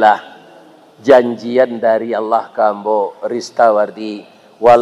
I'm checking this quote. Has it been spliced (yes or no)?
no